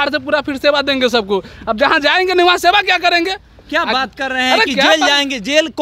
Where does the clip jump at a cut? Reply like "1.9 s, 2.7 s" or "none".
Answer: none